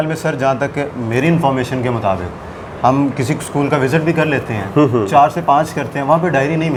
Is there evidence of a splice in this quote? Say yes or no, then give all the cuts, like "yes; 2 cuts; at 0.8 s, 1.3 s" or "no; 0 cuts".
no; 0 cuts